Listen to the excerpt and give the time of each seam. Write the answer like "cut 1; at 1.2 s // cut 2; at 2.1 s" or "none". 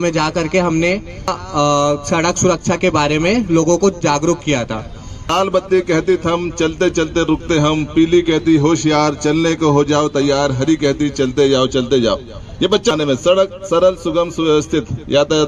cut 1; at 1.4 s // cut 2; at 5.3 s // cut 3; at 12.9 s